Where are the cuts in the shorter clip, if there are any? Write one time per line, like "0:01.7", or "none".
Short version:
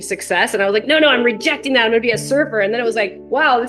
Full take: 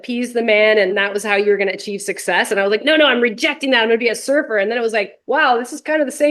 none